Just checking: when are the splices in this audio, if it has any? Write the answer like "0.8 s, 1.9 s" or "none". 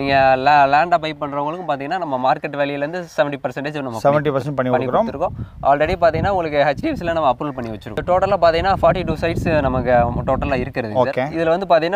7.9 s